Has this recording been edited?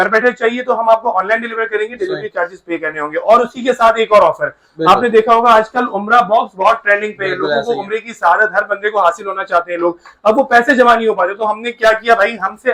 no; 0 cuts

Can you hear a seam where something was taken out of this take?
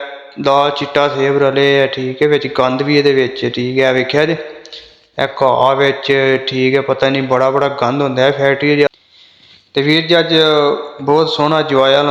yes; 1 cut; at 8.9 s

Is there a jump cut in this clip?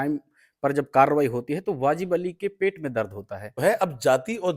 yes; 1 cut; at 3.6 s

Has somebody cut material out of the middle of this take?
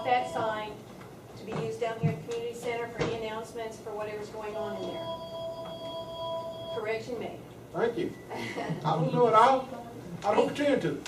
yes; 1 cut; at 3.5 s

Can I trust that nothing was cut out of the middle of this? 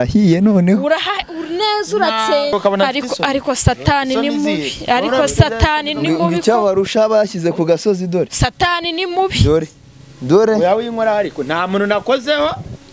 no; 1 cut; at 2.5 s

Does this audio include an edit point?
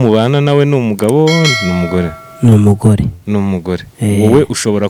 no; 0 cuts

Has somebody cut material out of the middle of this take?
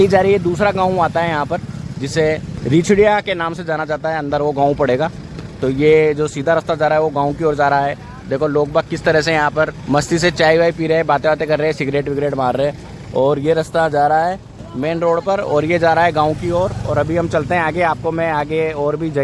no; 0 cuts

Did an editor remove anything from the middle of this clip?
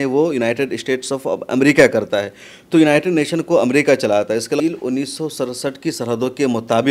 yes; 1 cut; at 4.6 s

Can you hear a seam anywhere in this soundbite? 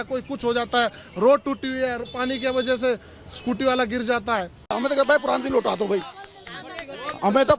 yes; 1 cut; at 4.8 s

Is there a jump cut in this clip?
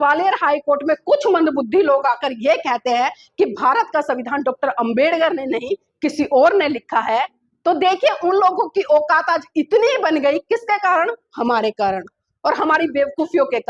no; 0 cuts

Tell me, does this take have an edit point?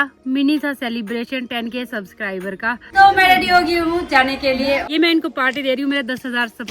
yes; 2 cuts; at 2.9 s, 4.8 s

